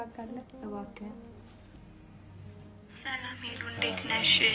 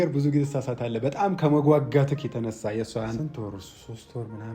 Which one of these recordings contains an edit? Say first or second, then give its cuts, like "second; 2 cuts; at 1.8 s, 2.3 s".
second; 1 cut; at 3.2 s